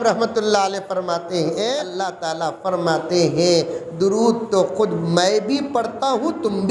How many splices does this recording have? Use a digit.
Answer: 1